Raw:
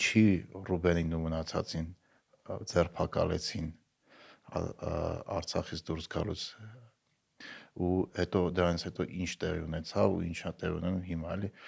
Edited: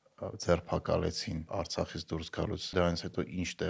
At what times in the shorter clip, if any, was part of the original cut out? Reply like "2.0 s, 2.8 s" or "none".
1.5 s, 2.7 s